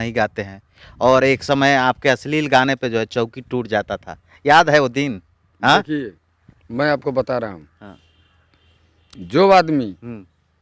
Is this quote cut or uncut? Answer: uncut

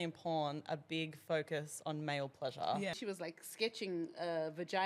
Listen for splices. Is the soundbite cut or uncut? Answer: cut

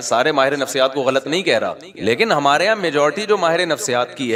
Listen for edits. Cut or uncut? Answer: uncut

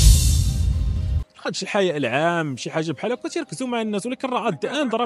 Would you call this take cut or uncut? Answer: cut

